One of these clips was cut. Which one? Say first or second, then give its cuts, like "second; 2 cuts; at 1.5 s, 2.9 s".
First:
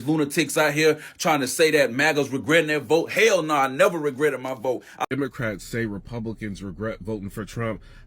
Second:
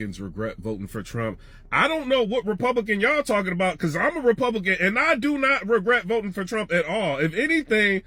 first; 1 cut; at 5.0 s